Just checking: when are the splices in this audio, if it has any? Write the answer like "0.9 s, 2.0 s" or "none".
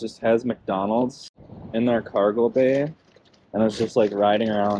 none